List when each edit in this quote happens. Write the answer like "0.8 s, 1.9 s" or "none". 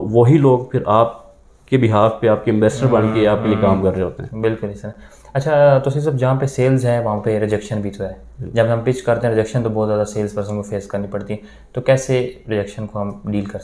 none

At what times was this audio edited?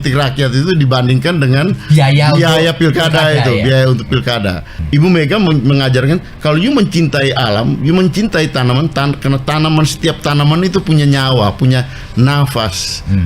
4.8 s

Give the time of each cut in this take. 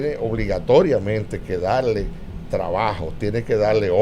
none

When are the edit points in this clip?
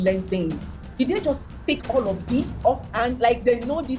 none

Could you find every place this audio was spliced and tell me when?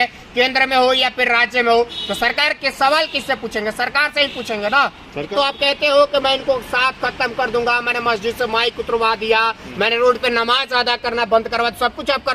5.3 s

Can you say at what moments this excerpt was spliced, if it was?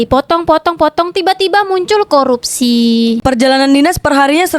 3.2 s

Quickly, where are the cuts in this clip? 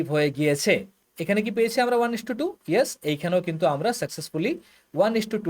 1.0 s

